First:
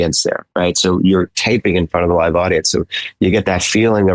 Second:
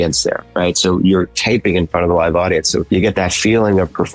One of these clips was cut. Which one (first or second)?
second